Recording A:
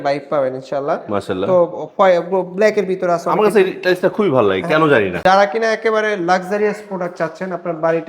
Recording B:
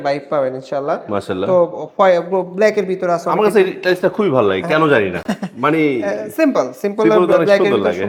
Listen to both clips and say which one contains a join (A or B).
A